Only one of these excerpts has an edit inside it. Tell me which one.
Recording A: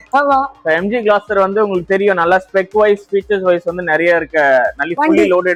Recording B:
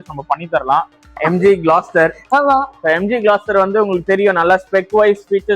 B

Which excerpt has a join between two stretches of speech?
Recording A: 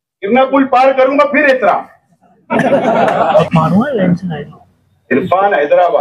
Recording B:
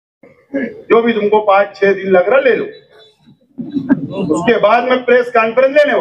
A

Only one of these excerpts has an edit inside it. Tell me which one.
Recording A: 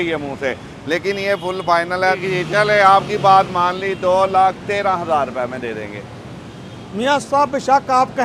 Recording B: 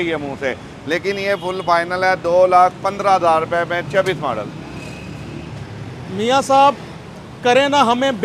A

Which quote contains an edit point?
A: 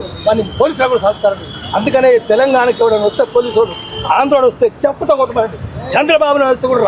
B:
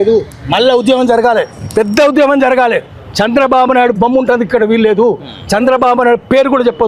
A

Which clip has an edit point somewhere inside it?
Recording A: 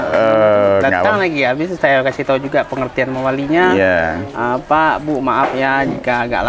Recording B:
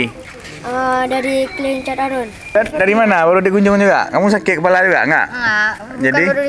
B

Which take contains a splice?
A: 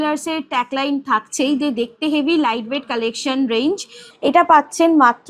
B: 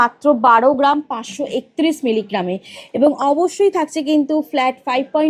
A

